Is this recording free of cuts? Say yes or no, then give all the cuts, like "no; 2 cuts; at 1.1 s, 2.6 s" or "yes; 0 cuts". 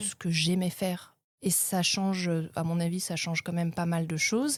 yes; 0 cuts